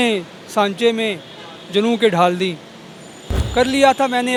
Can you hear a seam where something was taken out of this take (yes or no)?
no